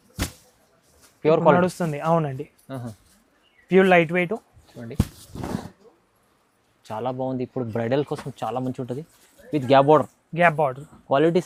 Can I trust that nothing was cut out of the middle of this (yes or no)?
yes